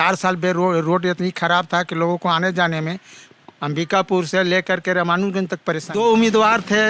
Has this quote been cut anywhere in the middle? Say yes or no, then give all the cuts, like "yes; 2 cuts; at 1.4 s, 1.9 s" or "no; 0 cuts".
yes; 1 cut; at 5.9 s